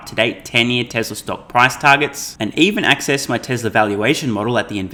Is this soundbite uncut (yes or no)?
yes